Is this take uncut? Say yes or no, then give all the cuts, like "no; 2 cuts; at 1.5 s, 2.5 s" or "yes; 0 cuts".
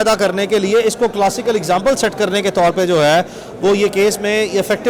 yes; 0 cuts